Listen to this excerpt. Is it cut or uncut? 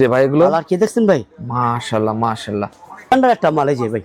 cut